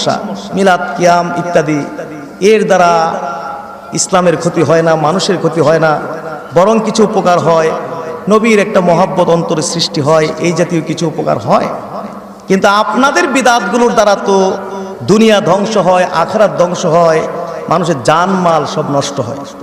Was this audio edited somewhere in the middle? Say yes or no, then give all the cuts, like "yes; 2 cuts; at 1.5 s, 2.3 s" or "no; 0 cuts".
no; 0 cuts